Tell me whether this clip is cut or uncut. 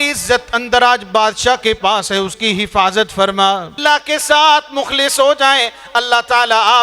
cut